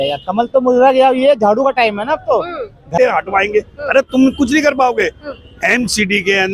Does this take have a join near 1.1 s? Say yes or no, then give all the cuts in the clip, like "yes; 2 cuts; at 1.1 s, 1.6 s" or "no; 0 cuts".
no; 1 cut; at 3.0 s